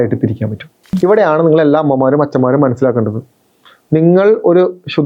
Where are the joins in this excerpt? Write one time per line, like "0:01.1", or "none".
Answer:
0:00.9